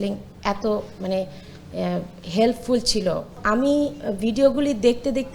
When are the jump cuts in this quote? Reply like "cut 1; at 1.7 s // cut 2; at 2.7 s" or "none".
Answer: cut 1; at 3.3 s